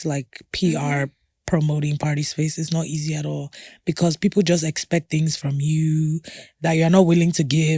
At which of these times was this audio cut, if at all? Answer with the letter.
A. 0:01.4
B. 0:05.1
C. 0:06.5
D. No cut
C